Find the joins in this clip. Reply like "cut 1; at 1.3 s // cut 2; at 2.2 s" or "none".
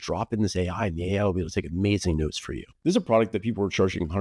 cut 1; at 2.6 s